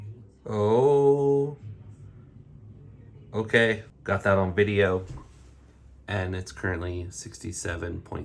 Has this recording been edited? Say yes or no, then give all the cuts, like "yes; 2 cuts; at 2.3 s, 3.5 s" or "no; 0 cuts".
yes; 1 cut; at 3.9 s